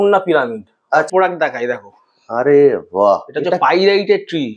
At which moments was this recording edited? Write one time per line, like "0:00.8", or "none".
0:01.1